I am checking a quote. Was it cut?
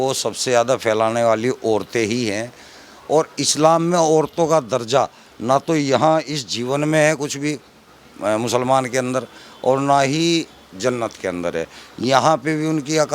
no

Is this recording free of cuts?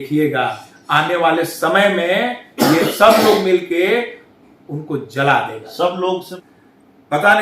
no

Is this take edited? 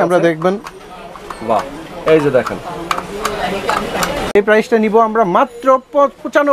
yes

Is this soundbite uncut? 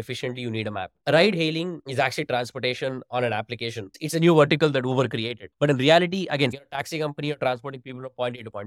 no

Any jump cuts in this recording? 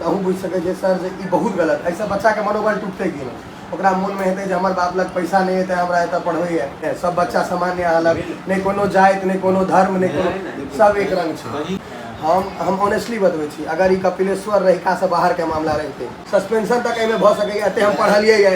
yes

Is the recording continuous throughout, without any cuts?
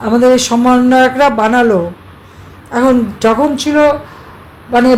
yes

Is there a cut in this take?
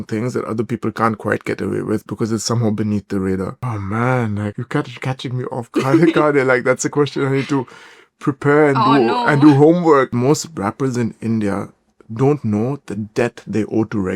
yes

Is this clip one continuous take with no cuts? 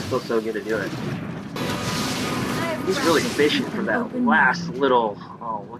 no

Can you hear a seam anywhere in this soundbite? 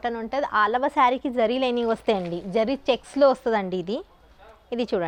no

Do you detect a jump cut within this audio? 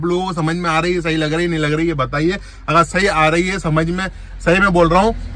no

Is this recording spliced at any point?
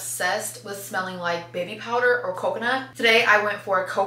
no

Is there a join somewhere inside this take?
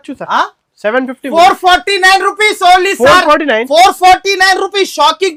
no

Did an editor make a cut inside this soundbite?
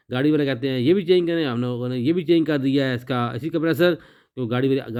no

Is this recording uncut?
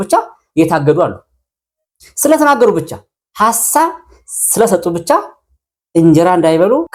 yes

